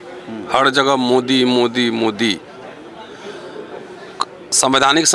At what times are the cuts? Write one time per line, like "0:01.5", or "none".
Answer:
none